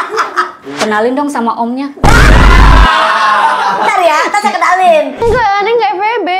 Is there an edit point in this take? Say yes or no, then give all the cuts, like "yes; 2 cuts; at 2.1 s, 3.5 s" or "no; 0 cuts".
yes; 1 cut; at 5.2 s